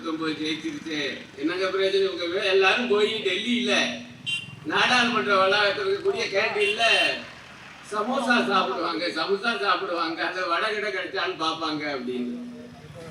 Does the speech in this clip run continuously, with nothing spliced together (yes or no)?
yes